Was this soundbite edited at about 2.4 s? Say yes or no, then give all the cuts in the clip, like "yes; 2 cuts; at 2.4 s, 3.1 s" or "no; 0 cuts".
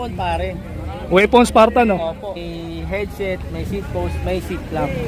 yes; 1 cut; at 2.4 s